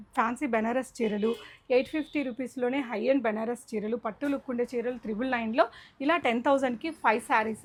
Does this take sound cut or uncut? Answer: uncut